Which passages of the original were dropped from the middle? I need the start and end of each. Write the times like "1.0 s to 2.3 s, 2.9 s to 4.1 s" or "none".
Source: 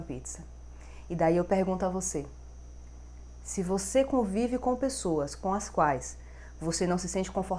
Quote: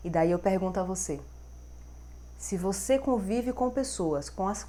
none

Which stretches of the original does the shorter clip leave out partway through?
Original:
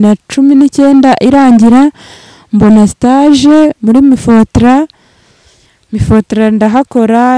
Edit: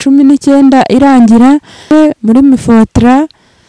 2.2 s to 3.5 s

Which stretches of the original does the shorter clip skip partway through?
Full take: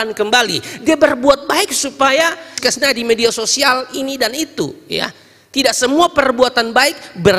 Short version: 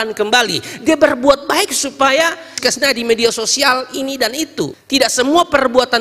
4.8 s to 5.4 s

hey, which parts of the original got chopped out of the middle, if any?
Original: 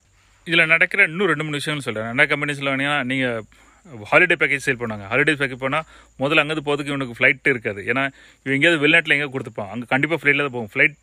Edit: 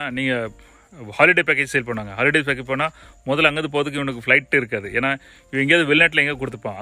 none

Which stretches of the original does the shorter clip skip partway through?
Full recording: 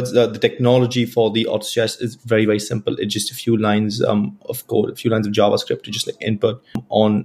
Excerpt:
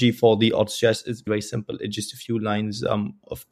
2.2 s to 2.4 s

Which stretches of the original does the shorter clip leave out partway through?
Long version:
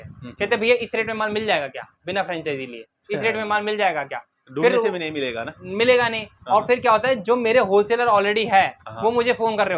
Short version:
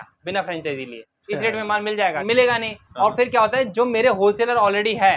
4.0 s to 5.7 s

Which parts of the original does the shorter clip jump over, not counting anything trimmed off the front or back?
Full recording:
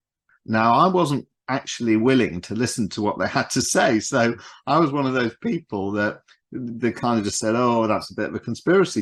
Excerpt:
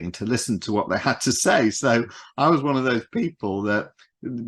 none

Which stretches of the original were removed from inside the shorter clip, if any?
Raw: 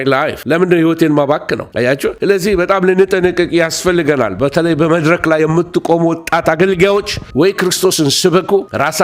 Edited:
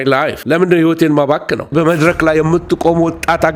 1.7 s to 4.8 s

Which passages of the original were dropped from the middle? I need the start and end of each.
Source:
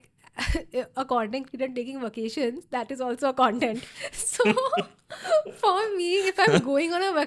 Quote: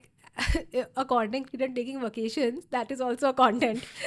none

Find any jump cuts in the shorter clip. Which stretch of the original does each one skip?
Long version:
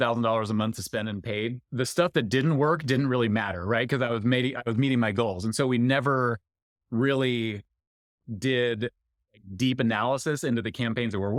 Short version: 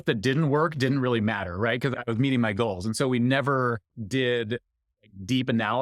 4.0 s to 4.5 s, 6.5 s to 8.2 s

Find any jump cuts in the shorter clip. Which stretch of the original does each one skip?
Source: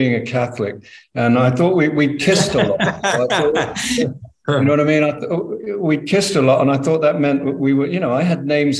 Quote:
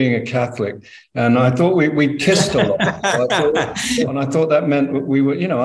4.2 s to 6.7 s

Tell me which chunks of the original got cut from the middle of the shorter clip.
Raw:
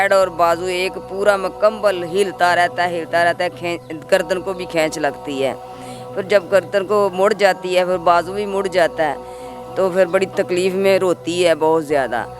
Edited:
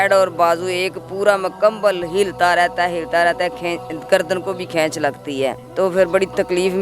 5.6 s to 9.6 s

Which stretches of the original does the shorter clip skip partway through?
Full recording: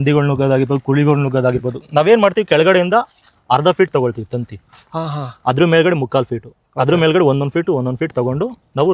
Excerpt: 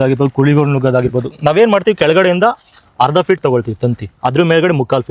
4.6 s to 5.3 s

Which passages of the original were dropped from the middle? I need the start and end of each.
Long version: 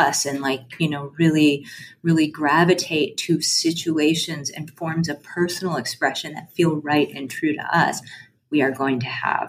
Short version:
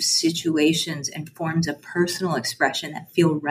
none

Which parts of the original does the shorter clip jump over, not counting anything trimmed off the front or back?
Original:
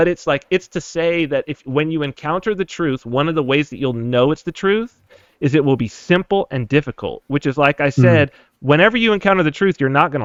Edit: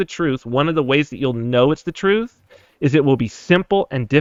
none

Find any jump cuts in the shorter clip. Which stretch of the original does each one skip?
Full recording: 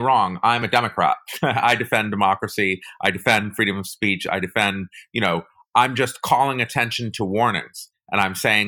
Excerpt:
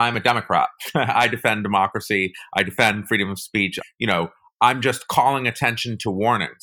4.2 s to 4.9 s

